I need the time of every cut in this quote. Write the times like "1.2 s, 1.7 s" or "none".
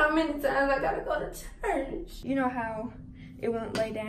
2.3 s